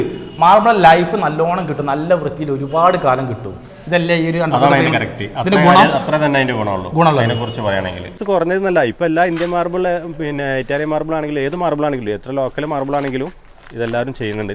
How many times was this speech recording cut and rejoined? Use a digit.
1